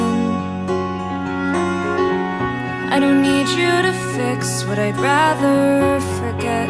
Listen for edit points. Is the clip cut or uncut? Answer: uncut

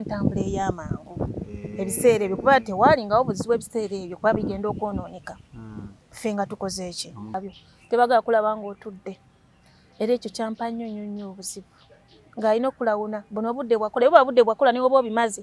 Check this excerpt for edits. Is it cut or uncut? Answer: cut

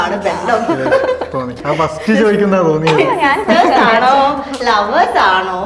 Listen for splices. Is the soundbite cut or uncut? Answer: cut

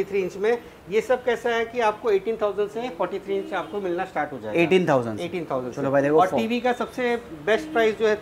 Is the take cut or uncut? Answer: uncut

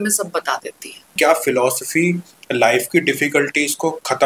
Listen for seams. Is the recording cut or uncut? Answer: cut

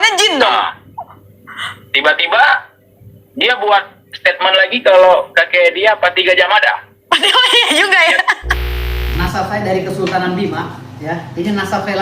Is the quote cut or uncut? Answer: cut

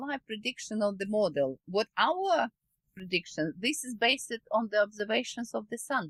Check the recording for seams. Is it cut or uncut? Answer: uncut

